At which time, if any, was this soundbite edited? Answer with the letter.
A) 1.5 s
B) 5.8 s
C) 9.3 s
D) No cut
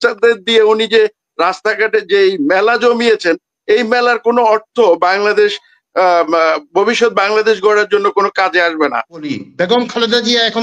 C